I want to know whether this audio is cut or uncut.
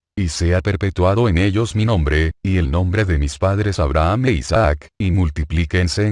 uncut